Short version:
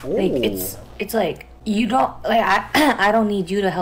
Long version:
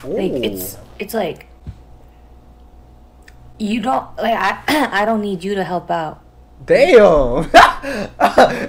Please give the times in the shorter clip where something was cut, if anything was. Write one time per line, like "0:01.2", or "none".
0:01.5